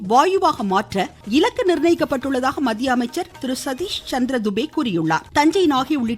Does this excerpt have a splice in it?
yes; 3 cuts; at 1.1 s, 3.3 s, 5.3 s

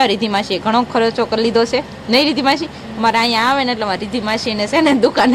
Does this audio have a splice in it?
no; 0 cuts

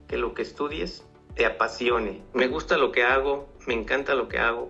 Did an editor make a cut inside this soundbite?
yes; 1 cut; at 2.2 s

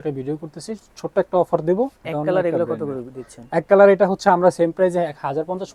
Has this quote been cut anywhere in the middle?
yes; 1 cut; at 2.0 s

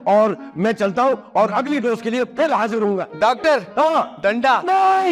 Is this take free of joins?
yes; 0 cuts

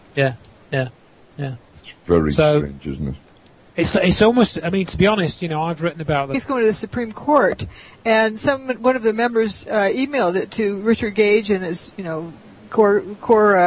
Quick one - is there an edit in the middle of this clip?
no; 0 cuts

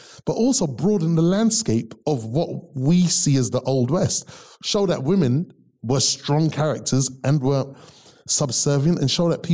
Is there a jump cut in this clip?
yes; 1 cut; at 7.7 s

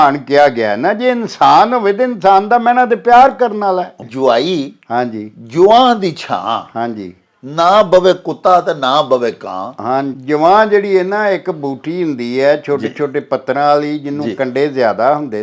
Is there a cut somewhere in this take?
yes; 1 cut; at 4.0 s

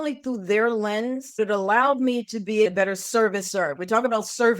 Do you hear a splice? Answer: yes; 2 cuts; at 1.4 s, 2.7 s

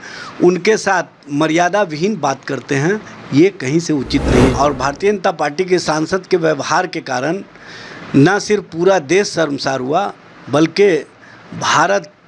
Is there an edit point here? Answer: yes; 1 cut; at 4.5 s

